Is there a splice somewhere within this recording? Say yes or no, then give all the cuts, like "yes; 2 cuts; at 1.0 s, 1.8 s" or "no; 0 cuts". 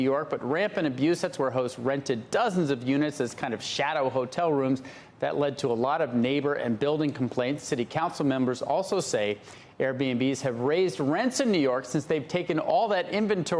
yes; 1 cut; at 1.7 s